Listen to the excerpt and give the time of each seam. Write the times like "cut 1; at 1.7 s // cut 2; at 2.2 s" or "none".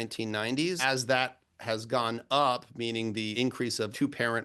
cut 1; at 0.8 s // cut 2; at 3.4 s